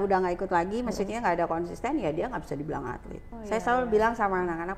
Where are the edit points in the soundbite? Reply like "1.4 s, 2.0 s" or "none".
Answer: 3.3 s